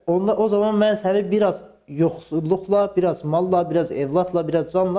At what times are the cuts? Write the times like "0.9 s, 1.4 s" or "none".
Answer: none